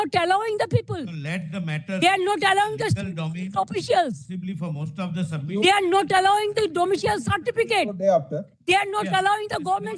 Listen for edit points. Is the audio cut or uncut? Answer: uncut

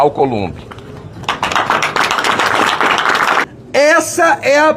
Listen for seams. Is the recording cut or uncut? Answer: cut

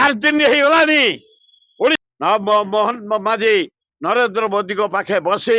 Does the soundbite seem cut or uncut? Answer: cut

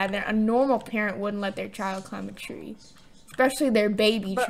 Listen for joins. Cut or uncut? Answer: uncut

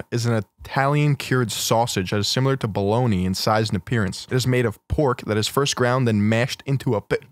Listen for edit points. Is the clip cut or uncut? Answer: cut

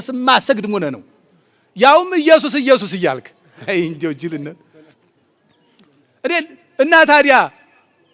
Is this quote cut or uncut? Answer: uncut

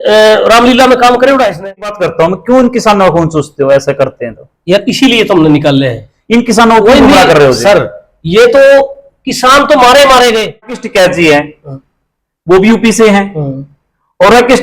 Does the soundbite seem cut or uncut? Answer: cut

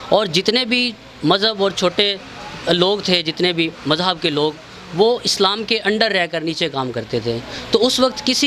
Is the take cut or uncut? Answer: uncut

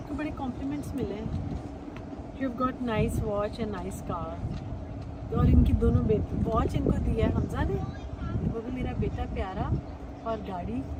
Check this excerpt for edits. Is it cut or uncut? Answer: uncut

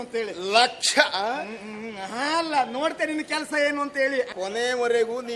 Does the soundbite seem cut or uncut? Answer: cut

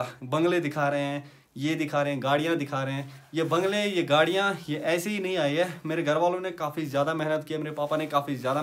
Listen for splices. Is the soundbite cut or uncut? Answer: uncut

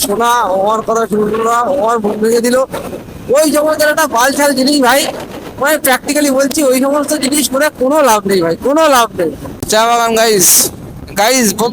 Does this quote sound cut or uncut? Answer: cut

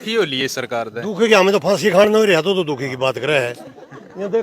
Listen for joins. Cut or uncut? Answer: uncut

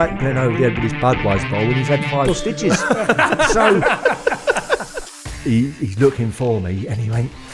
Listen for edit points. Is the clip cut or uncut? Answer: cut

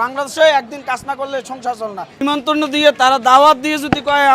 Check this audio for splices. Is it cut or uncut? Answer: cut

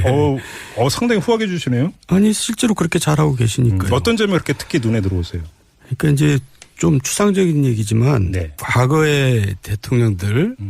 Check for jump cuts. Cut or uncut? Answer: uncut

